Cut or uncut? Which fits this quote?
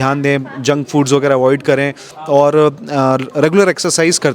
uncut